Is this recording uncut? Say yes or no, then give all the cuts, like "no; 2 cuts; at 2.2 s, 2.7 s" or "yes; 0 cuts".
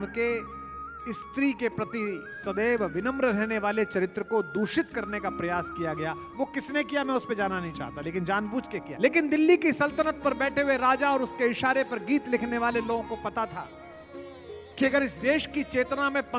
no; 1 cut; at 8.9 s